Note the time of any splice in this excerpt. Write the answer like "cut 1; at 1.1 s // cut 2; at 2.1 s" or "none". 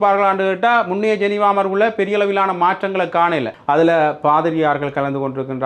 cut 1; at 3.5 s